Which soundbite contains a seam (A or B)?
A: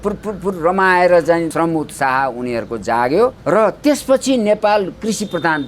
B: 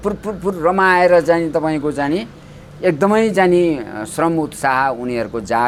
A